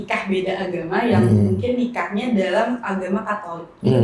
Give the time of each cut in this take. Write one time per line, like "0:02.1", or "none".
none

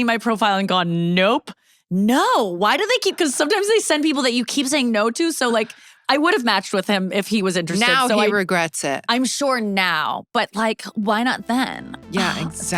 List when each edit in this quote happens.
none

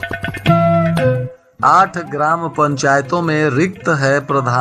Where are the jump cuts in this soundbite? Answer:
0:01.4

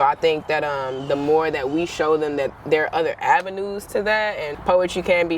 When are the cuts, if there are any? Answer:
0:04.5

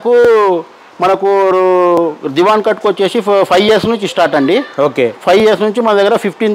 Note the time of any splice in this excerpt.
none

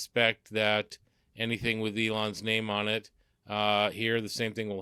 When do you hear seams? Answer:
none

